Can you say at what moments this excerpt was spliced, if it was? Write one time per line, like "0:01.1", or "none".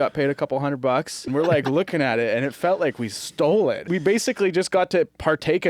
0:01.3
0:03.9